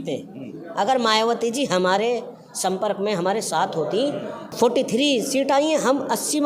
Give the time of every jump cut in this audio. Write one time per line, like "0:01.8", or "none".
0:04.5